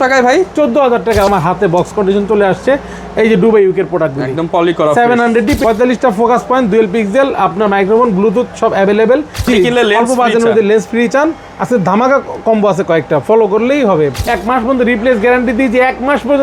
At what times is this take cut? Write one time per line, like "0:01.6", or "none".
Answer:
0:01.3
0:05.6
0:09.5
0:14.2

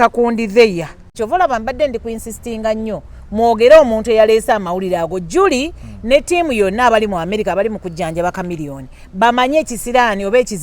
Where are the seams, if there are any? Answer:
0:01.1

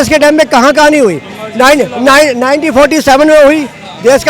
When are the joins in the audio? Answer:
none

